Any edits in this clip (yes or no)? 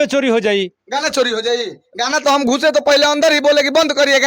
no